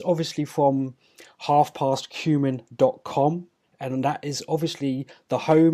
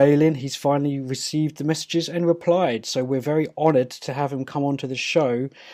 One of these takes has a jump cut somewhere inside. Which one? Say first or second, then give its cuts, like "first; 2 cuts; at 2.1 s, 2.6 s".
first; 1 cut; at 2.6 s